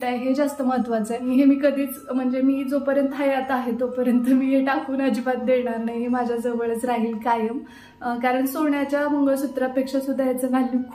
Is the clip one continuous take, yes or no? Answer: no